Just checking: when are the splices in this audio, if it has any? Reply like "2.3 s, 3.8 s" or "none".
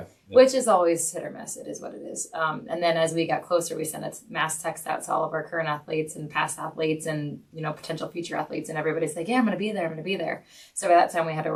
none

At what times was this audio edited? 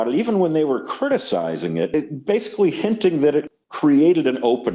1.9 s, 3.6 s

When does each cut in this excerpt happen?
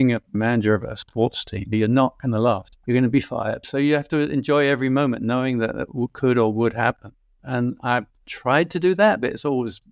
none

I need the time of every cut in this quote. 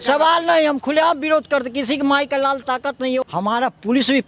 3.2 s

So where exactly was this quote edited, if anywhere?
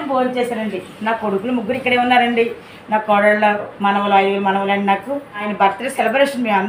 5.5 s

